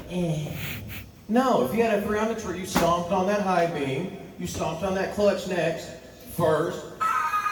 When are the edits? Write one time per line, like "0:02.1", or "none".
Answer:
none